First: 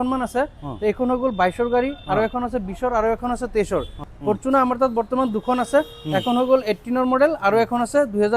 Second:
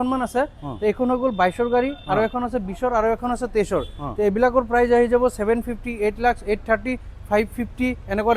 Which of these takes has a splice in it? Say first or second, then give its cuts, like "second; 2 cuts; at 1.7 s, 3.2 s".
first; 1 cut; at 4.0 s